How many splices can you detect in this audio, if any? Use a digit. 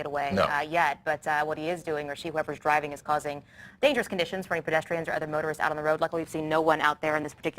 1